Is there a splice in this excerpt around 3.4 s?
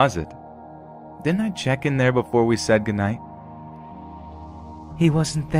no; 1 cut; at 1.7 s

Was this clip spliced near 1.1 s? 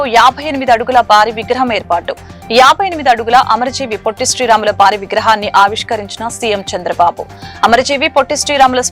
no; 0 cuts

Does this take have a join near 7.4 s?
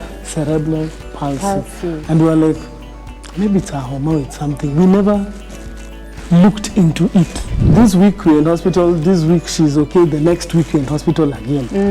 yes; 1 cut; at 7.4 s

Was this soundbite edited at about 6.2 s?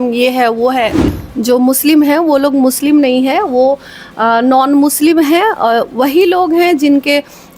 no; 1 cut; at 1.1 s

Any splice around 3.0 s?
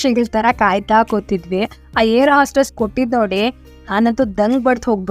no; 1 cut; at 1.8 s

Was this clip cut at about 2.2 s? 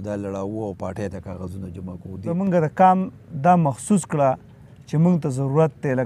yes; 1 cut; at 2.2 s

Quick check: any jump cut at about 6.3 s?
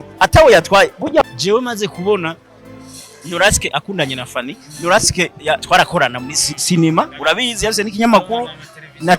no; 1 cut; at 1.2 s

